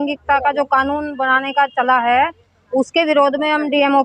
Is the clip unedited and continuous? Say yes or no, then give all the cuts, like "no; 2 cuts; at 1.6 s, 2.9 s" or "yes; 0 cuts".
yes; 0 cuts